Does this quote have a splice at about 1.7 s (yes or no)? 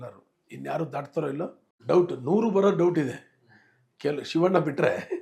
yes